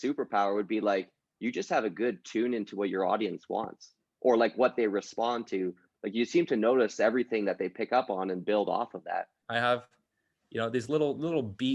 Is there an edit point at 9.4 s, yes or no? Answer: yes